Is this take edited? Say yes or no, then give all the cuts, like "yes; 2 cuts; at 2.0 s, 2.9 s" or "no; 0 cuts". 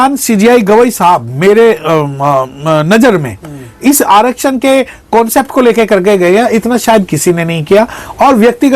no; 0 cuts